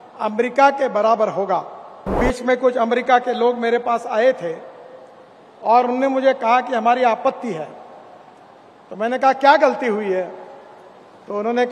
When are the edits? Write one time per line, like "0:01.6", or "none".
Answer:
0:02.2